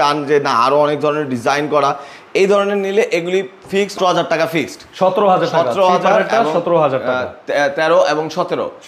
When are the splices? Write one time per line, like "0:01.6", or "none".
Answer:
0:03.9